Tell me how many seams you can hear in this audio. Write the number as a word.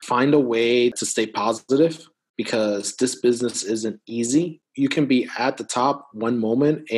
two